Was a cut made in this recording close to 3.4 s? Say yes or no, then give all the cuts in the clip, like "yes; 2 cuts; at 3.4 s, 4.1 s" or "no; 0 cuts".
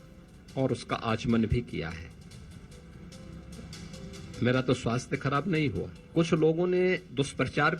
no; 1 cut; at 5.9 s